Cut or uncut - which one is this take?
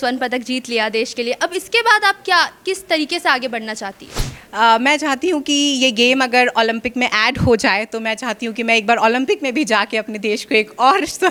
uncut